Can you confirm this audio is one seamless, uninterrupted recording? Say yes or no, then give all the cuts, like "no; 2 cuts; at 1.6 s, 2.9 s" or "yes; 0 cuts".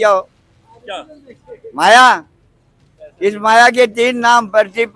yes; 0 cuts